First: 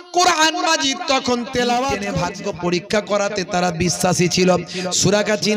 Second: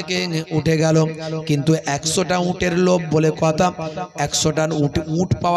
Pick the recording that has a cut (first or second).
first